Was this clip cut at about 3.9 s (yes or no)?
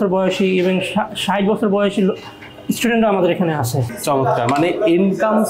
yes